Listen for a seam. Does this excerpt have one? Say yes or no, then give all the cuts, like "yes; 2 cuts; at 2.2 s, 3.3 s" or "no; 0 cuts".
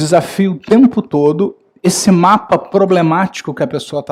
no; 0 cuts